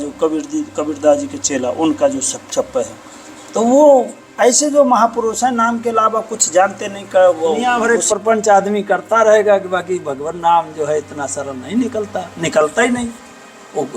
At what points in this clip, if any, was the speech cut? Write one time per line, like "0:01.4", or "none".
0:07.7